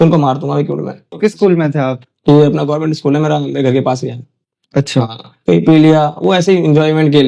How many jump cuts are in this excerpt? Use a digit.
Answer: 1